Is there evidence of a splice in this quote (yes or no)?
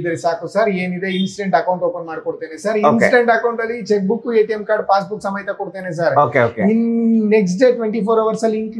no